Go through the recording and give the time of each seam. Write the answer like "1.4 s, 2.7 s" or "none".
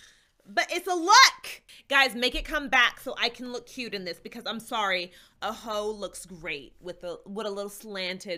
1.7 s